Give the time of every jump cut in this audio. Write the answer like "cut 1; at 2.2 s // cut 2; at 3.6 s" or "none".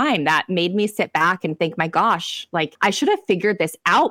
cut 1; at 2.7 s